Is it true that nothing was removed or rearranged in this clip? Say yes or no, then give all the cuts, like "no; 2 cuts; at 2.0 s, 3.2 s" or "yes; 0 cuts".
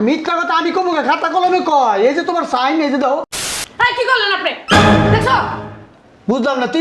no; 1 cut; at 3.3 s